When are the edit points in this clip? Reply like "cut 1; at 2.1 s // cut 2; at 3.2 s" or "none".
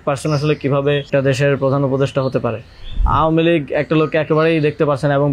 cut 1; at 1.1 s // cut 2; at 3.0 s